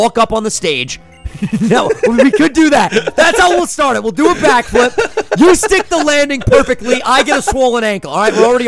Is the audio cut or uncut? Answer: uncut